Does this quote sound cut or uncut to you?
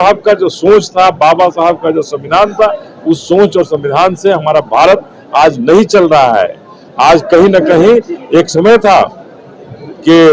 uncut